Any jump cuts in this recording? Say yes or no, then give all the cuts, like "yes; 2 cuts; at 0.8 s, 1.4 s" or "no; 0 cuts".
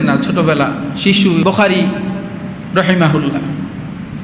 yes; 1 cut; at 1.4 s